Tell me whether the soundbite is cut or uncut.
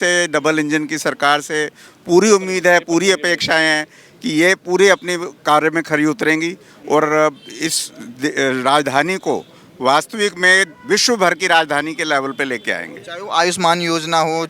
uncut